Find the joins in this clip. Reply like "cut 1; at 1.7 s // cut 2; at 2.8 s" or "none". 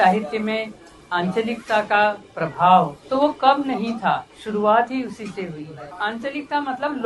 cut 1; at 3.0 s // cut 2; at 4.4 s // cut 3; at 5.8 s